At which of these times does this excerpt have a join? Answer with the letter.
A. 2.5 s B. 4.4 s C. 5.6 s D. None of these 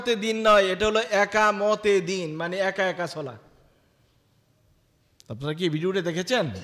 D